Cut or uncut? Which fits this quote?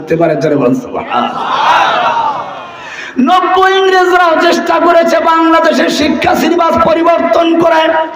uncut